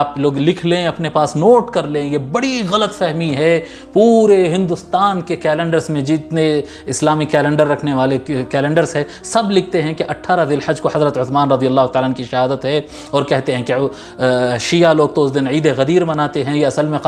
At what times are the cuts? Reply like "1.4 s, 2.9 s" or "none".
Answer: none